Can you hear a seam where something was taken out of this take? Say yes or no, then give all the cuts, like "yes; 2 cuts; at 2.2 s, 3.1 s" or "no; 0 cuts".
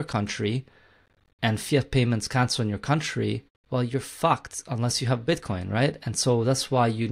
yes; 1 cut; at 3.5 s